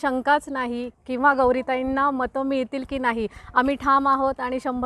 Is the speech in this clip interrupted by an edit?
yes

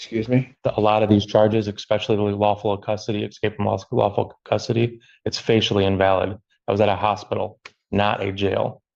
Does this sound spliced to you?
no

